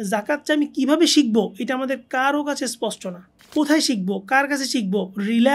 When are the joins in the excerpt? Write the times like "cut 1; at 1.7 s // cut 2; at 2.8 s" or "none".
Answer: cut 1; at 3.4 s